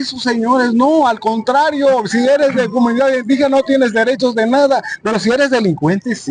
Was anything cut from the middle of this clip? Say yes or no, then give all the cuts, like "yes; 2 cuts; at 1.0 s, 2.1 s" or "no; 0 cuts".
no; 0 cuts